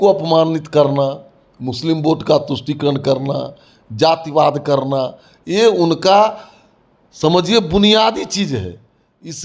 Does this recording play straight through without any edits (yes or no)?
yes